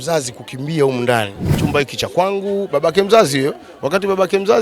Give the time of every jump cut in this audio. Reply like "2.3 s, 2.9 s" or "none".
1.5 s